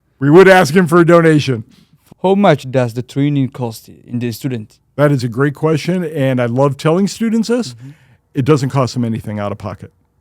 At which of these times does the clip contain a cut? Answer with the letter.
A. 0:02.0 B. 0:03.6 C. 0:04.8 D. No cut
A